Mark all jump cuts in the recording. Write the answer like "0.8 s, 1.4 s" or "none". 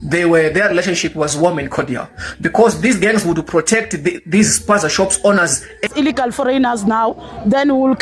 5.9 s